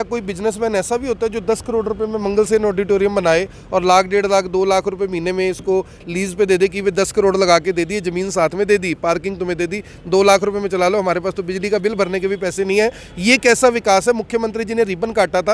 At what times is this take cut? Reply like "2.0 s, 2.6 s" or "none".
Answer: none

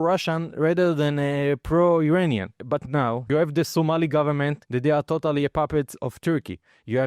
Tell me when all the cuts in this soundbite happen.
none

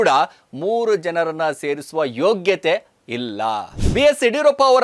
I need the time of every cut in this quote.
3.8 s

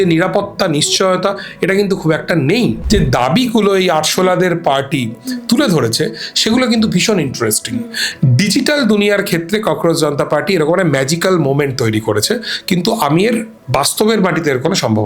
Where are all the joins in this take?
2.8 s, 8.0 s

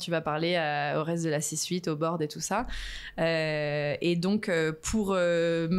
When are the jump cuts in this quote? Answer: none

